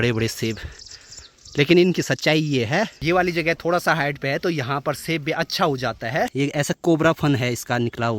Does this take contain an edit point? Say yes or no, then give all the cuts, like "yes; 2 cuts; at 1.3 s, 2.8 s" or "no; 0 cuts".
yes; 2 cuts; at 3.0 s, 6.3 s